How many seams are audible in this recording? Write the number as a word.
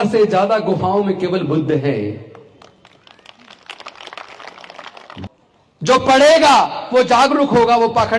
one